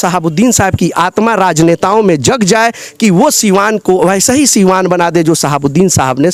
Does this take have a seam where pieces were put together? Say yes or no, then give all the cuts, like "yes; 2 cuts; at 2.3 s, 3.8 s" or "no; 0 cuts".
no; 0 cuts